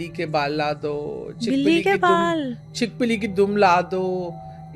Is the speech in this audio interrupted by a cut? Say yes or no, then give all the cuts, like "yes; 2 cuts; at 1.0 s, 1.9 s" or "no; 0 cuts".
no; 0 cuts